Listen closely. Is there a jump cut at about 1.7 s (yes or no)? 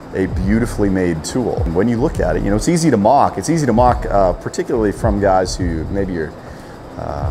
yes